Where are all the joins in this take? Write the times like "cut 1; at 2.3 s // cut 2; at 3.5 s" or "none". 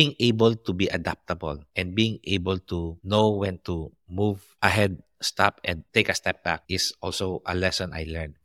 none